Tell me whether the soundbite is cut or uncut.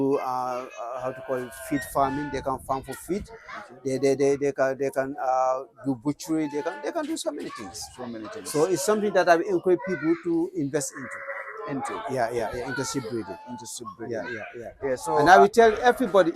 uncut